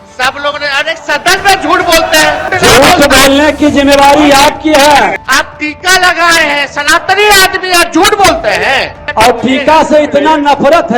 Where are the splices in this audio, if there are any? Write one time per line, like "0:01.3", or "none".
0:02.5
0:05.2
0:09.0